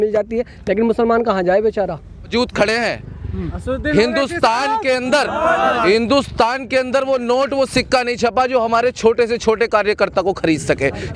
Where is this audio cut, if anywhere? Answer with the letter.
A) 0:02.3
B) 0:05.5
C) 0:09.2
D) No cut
A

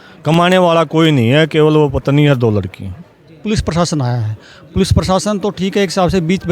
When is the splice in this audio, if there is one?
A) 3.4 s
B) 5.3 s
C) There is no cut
A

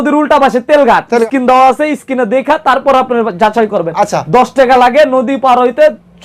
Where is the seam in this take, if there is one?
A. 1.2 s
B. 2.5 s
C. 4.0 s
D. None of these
A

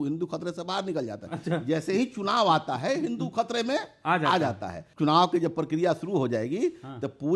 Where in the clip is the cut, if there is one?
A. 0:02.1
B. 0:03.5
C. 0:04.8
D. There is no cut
C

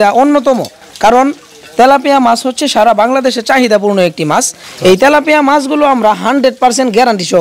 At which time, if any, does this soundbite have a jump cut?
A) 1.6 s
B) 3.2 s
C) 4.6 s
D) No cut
C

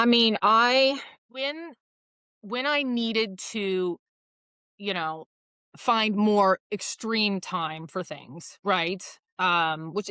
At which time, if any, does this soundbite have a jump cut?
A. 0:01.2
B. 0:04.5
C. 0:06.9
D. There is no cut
A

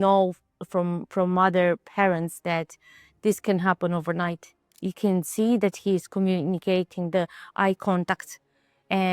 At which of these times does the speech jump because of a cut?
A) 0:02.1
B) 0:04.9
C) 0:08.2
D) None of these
B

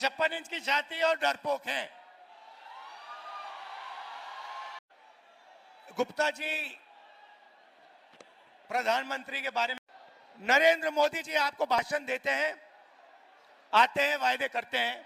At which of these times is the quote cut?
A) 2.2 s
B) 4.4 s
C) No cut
C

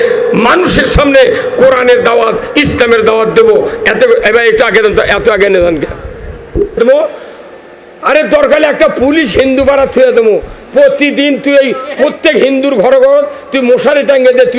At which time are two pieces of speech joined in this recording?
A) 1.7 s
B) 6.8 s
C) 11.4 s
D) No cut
B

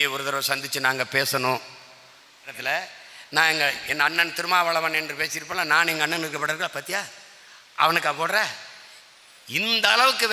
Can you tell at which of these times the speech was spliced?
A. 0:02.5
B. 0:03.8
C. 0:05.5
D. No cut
A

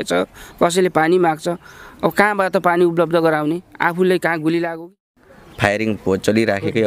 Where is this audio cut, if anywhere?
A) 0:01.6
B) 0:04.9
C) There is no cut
B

